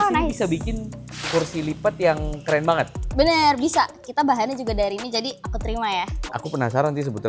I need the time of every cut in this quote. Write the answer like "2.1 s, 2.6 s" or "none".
6.2 s